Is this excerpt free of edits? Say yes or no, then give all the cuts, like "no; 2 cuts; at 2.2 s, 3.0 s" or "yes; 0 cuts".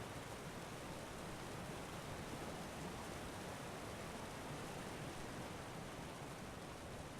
no; 1 cut; at 4.5 s